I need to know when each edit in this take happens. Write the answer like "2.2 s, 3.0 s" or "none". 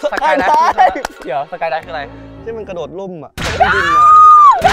1.2 s